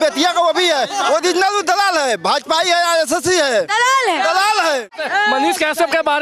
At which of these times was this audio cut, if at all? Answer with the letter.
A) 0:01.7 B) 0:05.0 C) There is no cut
B